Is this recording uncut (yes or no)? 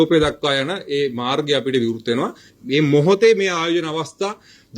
no